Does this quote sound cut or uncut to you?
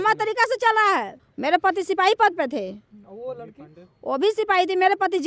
cut